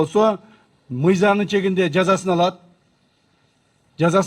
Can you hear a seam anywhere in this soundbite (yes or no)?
no